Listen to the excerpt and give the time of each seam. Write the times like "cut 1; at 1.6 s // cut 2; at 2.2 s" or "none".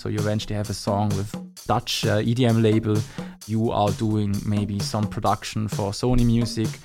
cut 1; at 1.5 s // cut 2; at 3.4 s